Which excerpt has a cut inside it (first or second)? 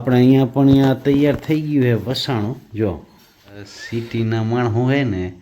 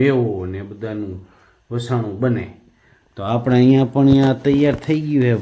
first